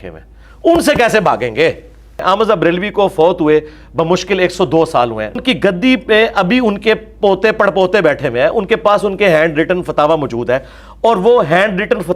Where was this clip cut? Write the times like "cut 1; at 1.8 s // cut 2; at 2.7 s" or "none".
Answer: cut 1; at 2.2 s // cut 2; at 5.4 s